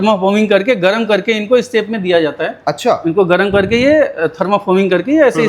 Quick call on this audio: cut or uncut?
uncut